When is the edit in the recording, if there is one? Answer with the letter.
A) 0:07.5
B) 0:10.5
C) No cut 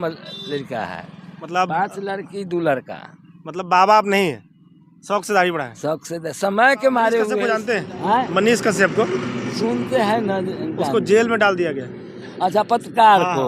A